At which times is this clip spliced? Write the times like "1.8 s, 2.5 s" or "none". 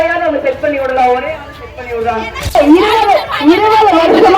2.3 s